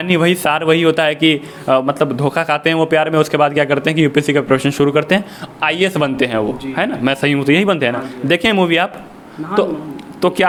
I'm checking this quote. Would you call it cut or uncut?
uncut